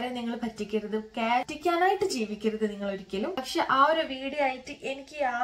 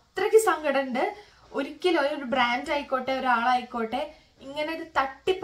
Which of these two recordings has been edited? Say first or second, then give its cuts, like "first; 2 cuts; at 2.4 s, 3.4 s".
first; 2 cuts; at 1.5 s, 3.4 s